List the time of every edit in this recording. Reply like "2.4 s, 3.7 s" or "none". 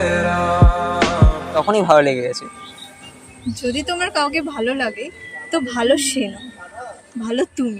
1.6 s